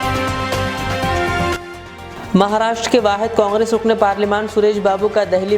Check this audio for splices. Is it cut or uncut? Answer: cut